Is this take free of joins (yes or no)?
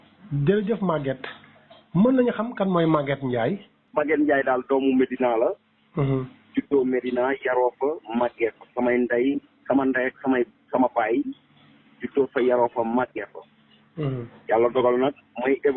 no